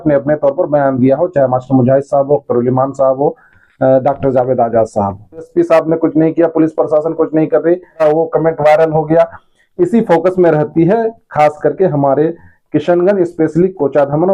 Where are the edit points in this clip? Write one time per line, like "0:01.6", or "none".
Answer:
0:05.5
0:08.0